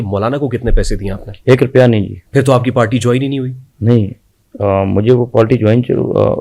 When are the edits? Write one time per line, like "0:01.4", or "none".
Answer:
0:02.2
0:03.6